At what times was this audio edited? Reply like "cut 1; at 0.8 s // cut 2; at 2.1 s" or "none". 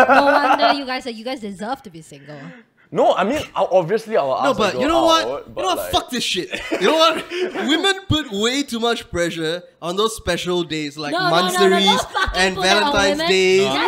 none